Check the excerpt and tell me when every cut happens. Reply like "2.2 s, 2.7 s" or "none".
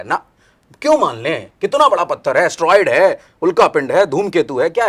none